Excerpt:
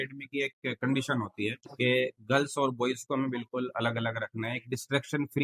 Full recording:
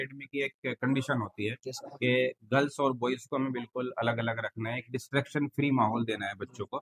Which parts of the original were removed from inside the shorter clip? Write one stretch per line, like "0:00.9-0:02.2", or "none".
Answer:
0:01.6-0:01.9